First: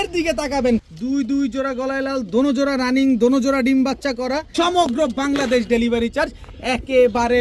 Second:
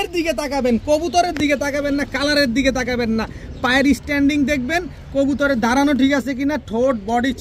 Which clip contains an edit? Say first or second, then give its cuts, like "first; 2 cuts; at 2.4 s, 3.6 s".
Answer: first; 2 cuts; at 0.8 s, 4.5 s